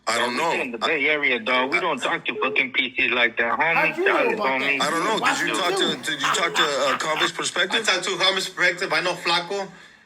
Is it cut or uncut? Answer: uncut